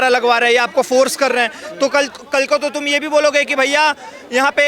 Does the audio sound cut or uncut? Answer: uncut